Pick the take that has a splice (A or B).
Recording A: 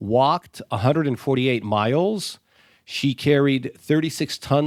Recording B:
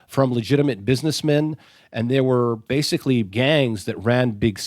B